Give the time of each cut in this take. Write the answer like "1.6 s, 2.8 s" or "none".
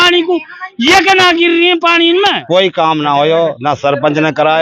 2.4 s